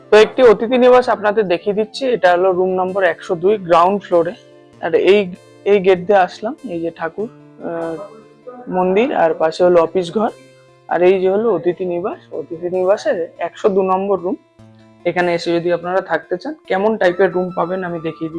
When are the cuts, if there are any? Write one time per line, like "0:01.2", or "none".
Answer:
none